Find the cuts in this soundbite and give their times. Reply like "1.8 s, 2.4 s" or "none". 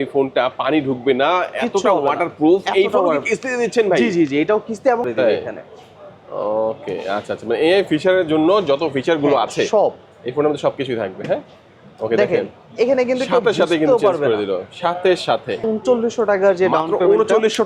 5.1 s, 15.7 s